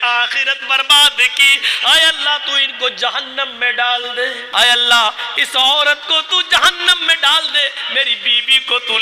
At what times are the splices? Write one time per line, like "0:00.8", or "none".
0:04.4

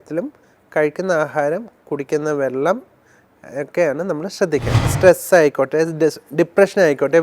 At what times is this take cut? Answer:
0:04.9

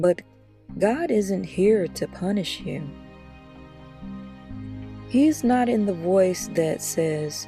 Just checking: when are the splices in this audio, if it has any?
none

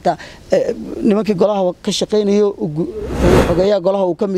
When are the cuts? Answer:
0:03.1

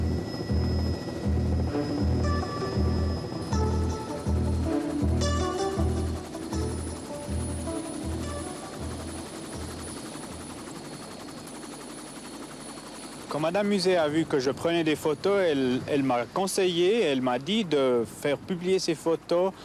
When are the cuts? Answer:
0:17.2

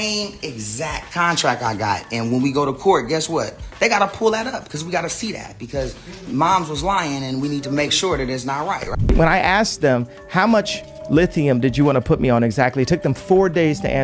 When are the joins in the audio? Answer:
0:09.1

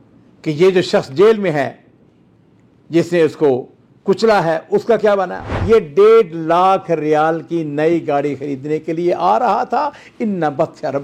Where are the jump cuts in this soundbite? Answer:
0:05.5

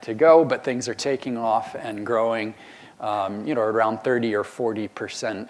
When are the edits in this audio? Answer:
0:04.2

